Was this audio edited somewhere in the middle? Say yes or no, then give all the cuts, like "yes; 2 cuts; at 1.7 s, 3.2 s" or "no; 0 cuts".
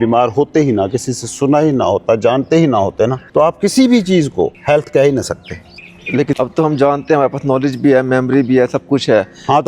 yes; 3 cuts; at 3.2 s, 4.6 s, 5.9 s